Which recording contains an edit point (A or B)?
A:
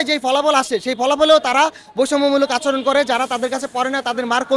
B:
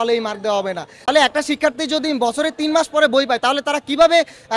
B